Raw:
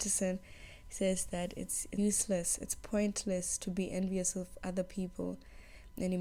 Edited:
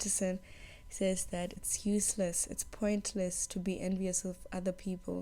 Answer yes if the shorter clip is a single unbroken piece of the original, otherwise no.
no